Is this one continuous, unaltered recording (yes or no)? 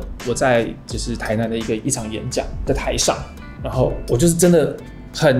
yes